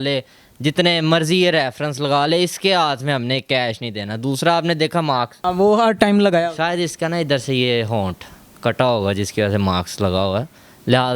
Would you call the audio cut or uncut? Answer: cut